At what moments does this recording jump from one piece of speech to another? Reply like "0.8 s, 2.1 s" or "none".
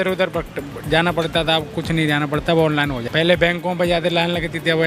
none